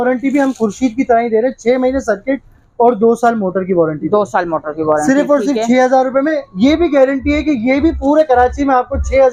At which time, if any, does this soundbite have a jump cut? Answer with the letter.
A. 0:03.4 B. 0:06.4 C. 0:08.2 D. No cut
D